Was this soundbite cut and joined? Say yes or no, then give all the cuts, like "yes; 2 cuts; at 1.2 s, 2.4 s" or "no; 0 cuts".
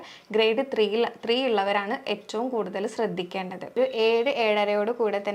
yes; 1 cut; at 3.8 s